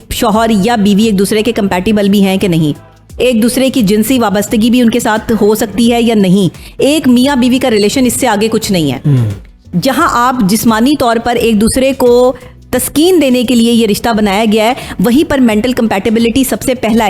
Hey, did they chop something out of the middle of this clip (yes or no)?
no